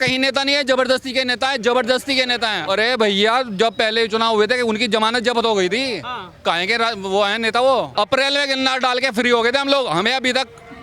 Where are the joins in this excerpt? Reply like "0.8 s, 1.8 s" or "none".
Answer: 2.6 s, 7.9 s